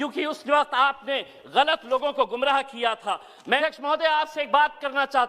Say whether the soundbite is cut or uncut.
cut